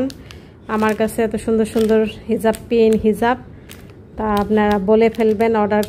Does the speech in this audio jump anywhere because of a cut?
no; 0 cuts

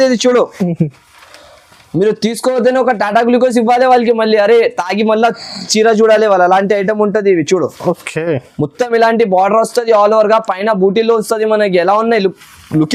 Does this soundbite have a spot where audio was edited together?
no; 0 cuts

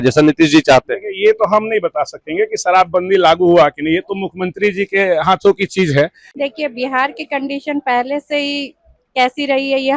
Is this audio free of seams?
no; 1 cut; at 6.2 s

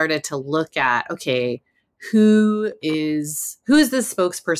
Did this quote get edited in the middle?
no; 0 cuts

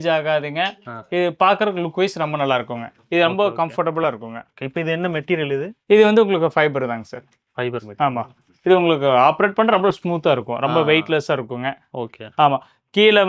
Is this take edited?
no; 0 cuts

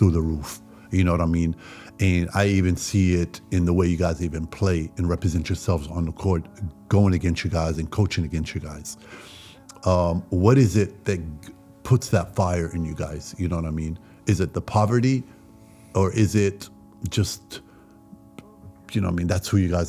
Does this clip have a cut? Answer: no; 0 cuts

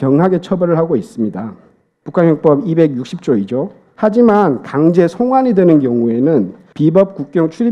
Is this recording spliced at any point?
yes; 2 cuts; at 3.8 s, 6.6 s

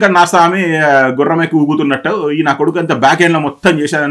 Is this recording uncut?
yes; 0 cuts

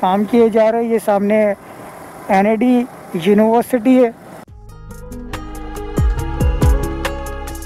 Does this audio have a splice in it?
no; 0 cuts

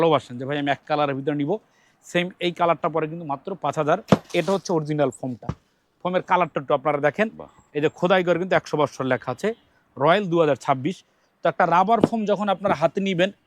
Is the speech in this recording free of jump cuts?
no; 1 cut; at 4.3 s

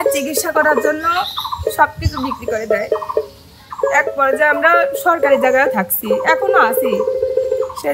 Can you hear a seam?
no; 0 cuts

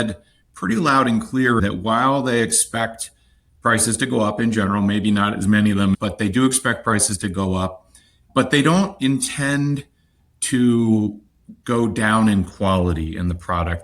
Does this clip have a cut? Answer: yes; 2 cuts; at 1.6 s, 6.0 s

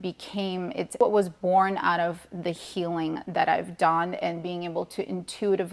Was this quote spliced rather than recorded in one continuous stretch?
yes; 1 cut; at 0.9 s

